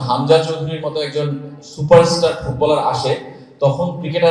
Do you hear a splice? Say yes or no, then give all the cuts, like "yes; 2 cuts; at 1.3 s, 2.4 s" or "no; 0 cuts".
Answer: no; 0 cuts